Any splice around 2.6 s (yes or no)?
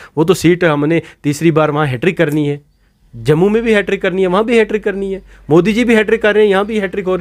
no